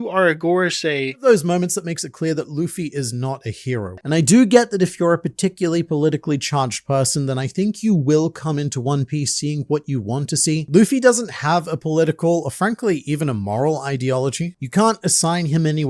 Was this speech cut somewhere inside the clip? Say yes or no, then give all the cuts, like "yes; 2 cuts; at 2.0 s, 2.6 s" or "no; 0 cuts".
yes; 3 cuts; at 1.1 s, 4.0 s, 10.6 s